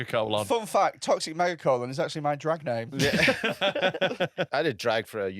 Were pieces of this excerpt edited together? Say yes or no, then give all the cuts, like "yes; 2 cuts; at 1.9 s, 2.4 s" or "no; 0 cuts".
yes; 1 cut; at 4.5 s